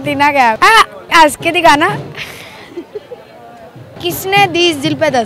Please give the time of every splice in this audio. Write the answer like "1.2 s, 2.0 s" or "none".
1.0 s, 3.9 s